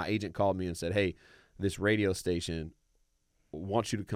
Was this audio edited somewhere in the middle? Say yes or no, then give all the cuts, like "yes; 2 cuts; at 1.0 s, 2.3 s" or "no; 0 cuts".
no; 0 cuts